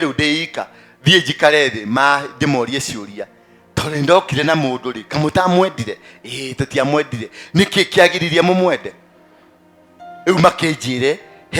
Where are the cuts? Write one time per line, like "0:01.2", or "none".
none